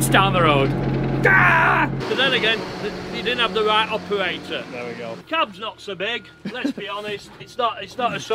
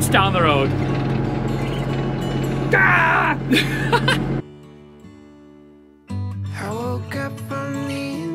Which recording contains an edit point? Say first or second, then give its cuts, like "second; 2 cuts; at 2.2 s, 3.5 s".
first; 3 cuts; at 0.7 s, 2.0 s, 7.4 s